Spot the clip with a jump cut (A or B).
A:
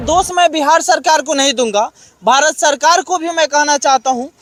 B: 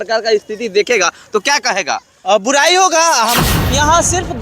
B